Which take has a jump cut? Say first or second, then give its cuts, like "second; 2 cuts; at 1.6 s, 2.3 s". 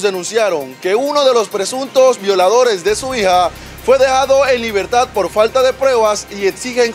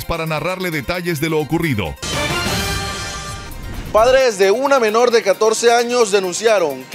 second; 2 cuts; at 2.0 s, 3.1 s